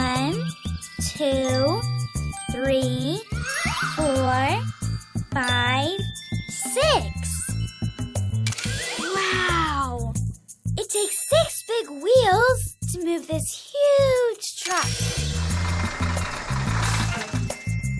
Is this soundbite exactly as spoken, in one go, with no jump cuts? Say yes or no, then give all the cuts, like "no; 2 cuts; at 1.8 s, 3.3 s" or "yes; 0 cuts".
yes; 0 cuts